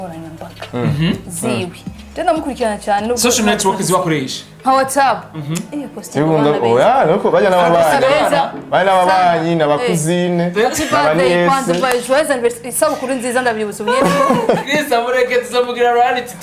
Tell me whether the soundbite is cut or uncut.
uncut